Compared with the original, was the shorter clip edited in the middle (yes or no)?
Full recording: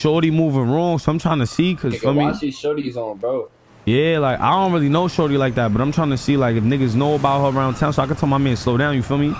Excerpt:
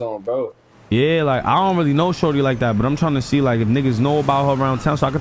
no